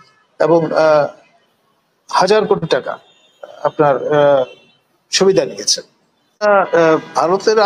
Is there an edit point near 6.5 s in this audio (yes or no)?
yes